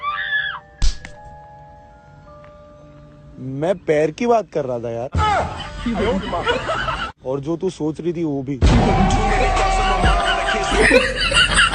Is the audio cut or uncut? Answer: cut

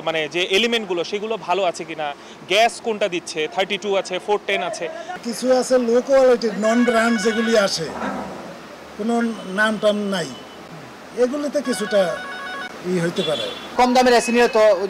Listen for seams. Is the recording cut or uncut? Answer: uncut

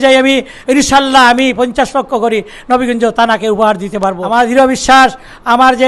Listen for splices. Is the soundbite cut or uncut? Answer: cut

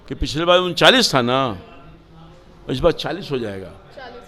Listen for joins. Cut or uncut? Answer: uncut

